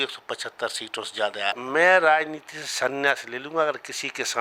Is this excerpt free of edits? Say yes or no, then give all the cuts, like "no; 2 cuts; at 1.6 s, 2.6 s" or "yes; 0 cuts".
no; 1 cut; at 1.5 s